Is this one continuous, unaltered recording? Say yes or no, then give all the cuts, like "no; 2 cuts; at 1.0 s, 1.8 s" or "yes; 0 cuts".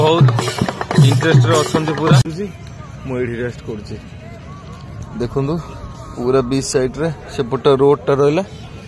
no; 1 cut; at 2.3 s